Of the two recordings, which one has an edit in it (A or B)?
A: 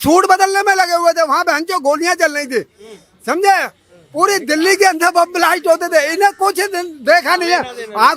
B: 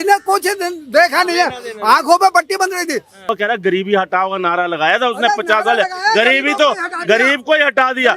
B